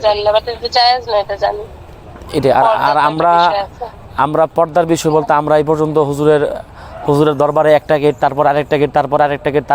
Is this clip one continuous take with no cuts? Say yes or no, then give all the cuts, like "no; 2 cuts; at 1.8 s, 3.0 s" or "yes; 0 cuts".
yes; 0 cuts